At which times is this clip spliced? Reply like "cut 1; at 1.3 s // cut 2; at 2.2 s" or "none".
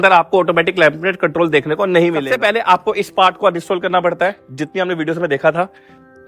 cut 1; at 2.2 s